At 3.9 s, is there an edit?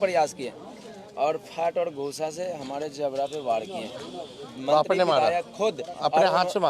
no; 0 cuts

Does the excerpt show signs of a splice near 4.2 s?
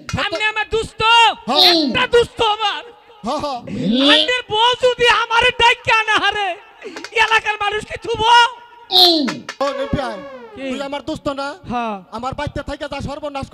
no; 1 cut; at 9.5 s

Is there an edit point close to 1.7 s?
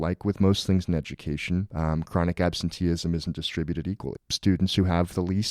yes; 2 cuts; at 1.7 s, 4.3 s

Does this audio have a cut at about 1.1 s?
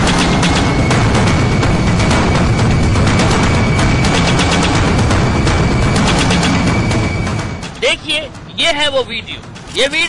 no; 0 cuts

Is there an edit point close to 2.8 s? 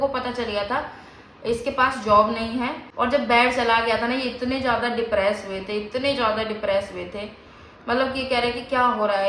yes; 1 cut; at 2.8 s

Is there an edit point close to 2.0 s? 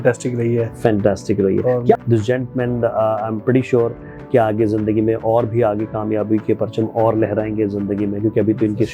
yes; 1 cut; at 2.0 s

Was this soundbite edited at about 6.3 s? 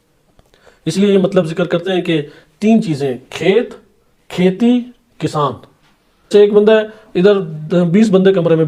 yes; 1 cut; at 6.3 s

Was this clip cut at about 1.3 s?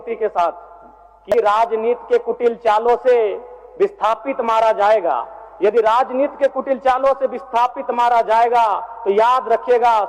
yes; 1 cut; at 1.3 s

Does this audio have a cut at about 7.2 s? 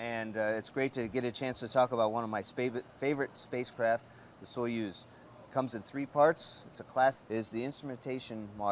no; 0 cuts

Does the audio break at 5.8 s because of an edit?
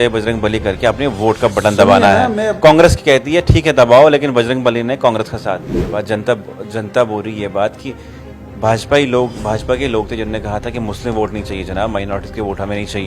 yes; 1 cut; at 5.8 s

